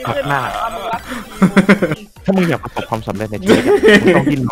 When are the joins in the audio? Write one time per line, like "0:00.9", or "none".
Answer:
0:02.1